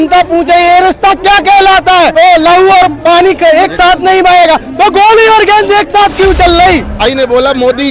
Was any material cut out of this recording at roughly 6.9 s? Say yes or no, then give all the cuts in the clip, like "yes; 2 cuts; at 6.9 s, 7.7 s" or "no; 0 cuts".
yes; 2 cuts; at 2.1 s, 6.9 s